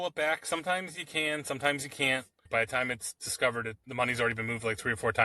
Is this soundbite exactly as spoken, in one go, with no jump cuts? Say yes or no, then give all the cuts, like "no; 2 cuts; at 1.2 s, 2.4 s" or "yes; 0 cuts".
no; 1 cut; at 2.5 s